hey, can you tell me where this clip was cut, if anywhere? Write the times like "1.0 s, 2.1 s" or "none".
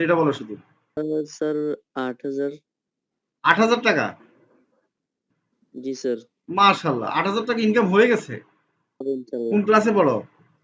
1.0 s, 9.0 s